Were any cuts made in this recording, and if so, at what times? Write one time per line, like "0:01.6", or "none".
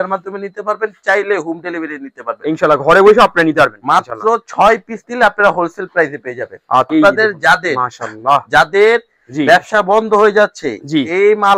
0:06.9